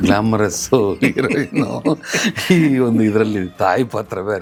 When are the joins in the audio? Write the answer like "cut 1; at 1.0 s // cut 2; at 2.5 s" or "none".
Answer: none